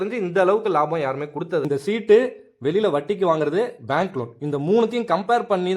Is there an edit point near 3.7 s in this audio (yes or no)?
no